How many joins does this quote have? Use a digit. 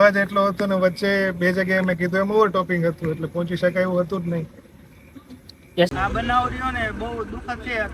1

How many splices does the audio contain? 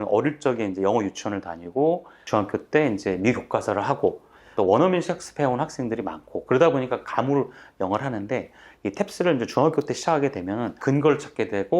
3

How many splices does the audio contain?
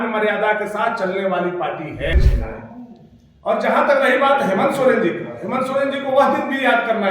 1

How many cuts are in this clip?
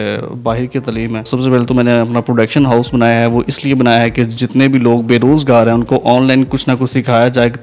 1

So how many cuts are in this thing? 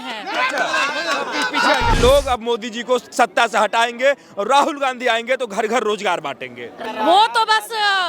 2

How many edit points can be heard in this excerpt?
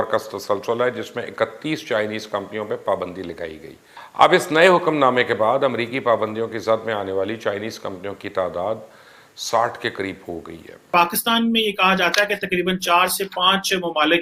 1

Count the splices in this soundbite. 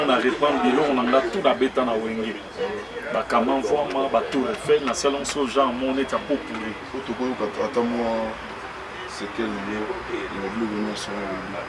0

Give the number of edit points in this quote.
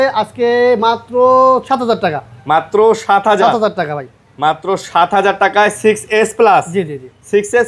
0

